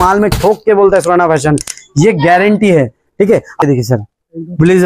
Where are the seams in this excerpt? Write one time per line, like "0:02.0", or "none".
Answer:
0:03.6